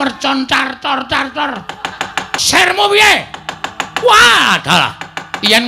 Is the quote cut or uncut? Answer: cut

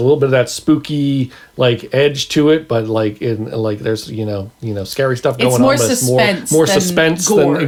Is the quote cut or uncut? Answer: uncut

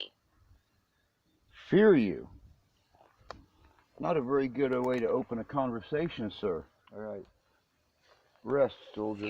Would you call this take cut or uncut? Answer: cut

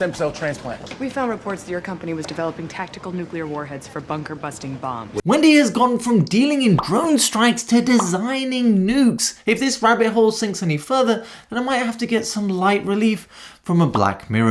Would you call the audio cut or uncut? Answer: uncut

